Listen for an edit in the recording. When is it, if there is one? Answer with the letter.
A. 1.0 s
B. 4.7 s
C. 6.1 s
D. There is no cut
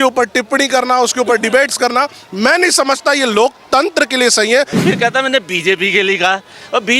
B